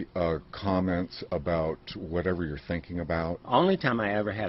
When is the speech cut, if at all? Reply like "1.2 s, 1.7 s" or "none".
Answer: none